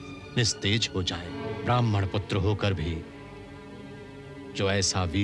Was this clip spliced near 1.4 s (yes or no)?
yes